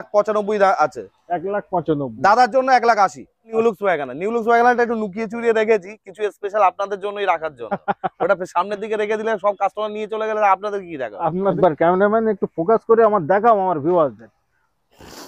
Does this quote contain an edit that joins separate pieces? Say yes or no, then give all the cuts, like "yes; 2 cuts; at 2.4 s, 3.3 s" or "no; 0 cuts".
yes; 2 cuts; at 3.5 s, 11.5 s